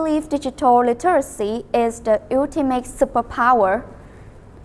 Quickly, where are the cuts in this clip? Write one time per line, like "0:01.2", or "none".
none

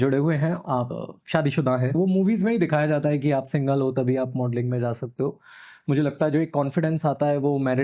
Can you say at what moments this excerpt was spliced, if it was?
0:00.8
0:01.9

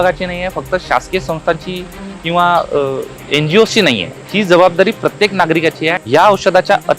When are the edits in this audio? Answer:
0:03.1
0:04.2
0:06.0

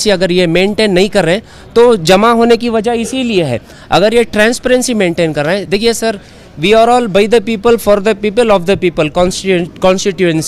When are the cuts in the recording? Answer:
none

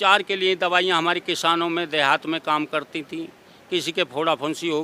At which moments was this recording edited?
none

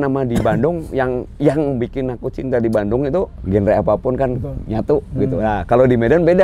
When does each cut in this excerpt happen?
0:03.4

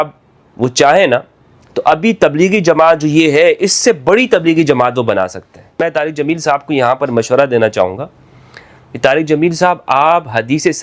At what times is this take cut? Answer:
0:05.8

